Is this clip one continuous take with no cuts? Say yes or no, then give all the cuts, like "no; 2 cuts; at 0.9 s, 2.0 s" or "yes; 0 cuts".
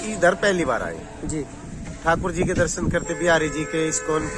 yes; 0 cuts